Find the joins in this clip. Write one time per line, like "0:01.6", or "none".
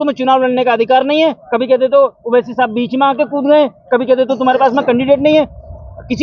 none